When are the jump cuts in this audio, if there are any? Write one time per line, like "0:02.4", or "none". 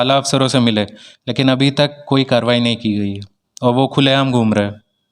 none